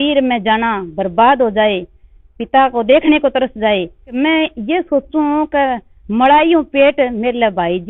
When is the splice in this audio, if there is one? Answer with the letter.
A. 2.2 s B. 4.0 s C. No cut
B